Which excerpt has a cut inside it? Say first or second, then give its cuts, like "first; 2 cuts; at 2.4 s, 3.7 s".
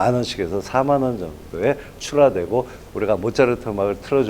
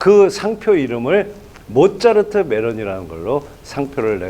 first; 1 cut; at 2.8 s